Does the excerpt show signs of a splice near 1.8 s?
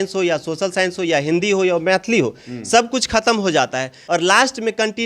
no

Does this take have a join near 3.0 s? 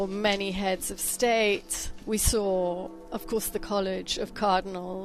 yes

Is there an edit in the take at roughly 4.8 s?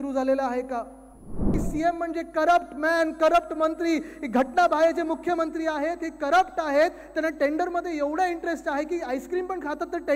no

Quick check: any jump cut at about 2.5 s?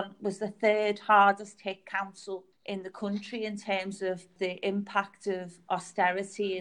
yes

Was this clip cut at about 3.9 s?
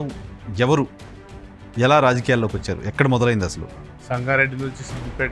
yes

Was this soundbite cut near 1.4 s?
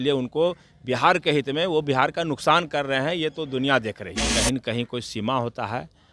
no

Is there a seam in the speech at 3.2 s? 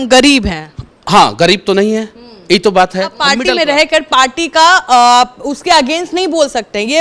yes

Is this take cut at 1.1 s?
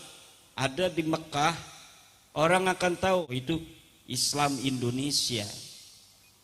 no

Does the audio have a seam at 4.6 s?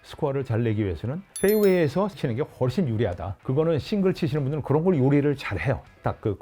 no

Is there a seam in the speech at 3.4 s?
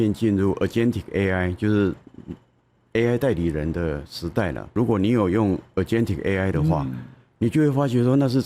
no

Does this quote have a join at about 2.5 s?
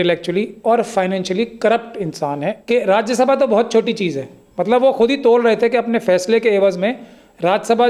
yes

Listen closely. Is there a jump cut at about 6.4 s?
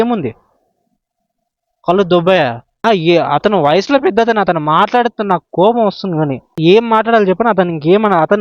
yes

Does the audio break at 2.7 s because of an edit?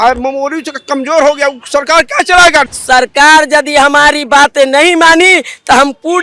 yes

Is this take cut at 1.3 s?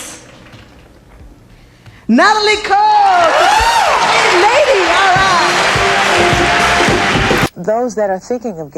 no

